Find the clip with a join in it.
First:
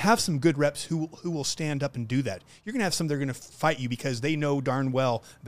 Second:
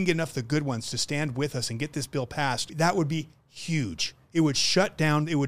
second; 1 cut; at 2.7 s

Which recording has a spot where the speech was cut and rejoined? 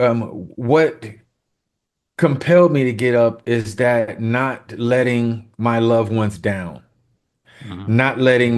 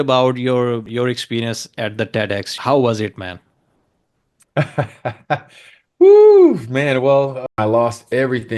second; 3 cuts; at 0.9 s, 2.5 s, 7.5 s

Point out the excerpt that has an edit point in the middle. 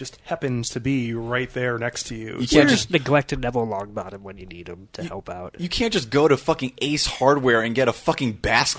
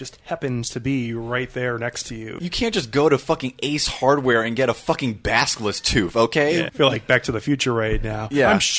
second; 2 cuts; at 2.3 s, 6.7 s

